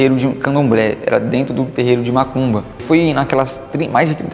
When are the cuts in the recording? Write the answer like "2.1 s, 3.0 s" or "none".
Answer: 2.8 s